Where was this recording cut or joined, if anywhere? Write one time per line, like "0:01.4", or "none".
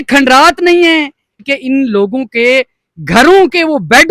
0:01.5